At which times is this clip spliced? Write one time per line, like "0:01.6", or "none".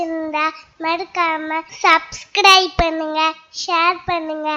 0:01.7